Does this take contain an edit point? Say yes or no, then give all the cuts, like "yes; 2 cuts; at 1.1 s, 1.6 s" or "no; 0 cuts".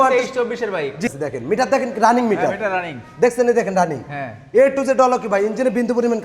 yes; 1 cut; at 1.1 s